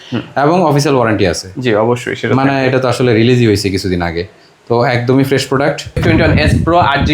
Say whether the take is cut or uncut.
cut